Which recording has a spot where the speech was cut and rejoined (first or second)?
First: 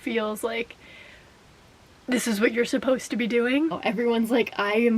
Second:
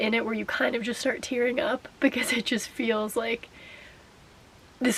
first